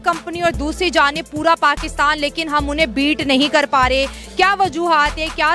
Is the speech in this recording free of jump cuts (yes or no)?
yes